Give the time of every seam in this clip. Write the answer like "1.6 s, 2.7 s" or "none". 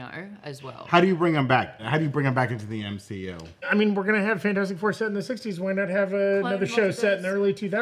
1.8 s, 3.7 s